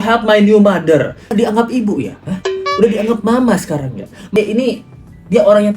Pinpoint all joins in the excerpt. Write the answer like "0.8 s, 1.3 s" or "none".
1.3 s, 4.3 s